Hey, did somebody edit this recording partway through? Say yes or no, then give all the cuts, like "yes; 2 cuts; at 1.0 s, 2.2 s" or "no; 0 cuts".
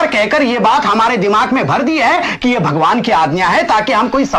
no; 0 cuts